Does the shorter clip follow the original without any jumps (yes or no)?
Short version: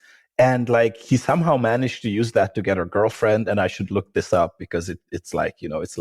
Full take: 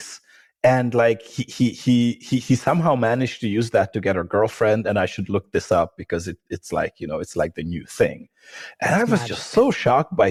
no